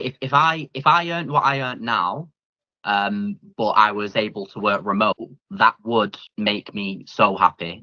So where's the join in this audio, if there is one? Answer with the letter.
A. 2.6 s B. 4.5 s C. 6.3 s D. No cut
D